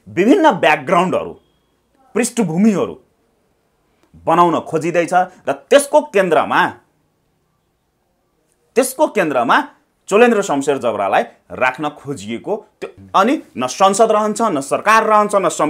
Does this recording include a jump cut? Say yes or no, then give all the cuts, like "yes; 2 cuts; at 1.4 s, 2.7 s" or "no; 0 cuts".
yes; 1 cut; at 12.8 s